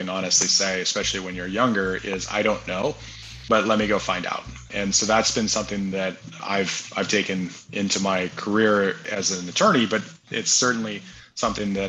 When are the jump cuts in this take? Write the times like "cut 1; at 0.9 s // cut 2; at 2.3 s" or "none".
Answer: cut 1; at 4.7 s // cut 2; at 6.4 s // cut 3; at 9.0 s

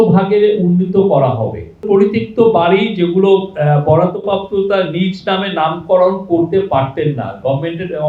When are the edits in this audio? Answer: cut 1; at 1.9 s

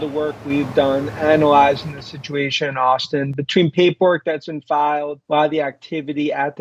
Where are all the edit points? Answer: cut 1; at 5.2 s

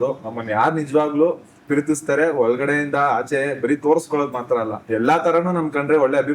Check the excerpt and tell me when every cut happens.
cut 1; at 4.8 s

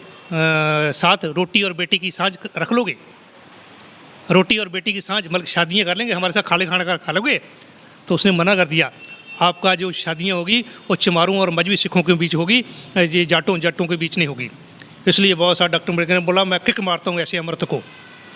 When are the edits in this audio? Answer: none

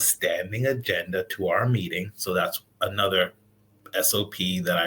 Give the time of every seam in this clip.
none

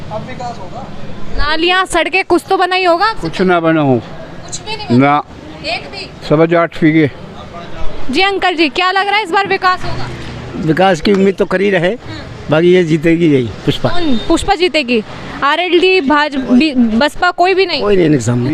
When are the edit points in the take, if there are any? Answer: none

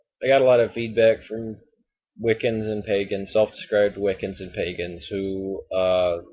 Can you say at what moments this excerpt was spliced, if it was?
cut 1; at 2.5 s

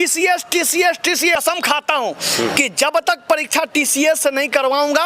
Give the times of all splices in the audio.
cut 1; at 1.4 s

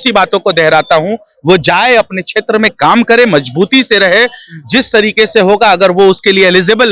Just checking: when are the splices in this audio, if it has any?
none

